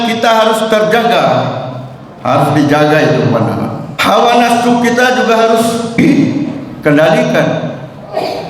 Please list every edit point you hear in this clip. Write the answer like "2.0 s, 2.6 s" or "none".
3.9 s, 6.0 s